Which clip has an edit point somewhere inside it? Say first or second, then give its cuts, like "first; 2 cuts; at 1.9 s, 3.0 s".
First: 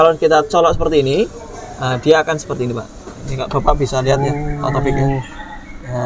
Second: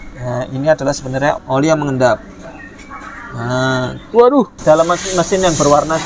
second; 2 cuts; at 1.4 s, 4.5 s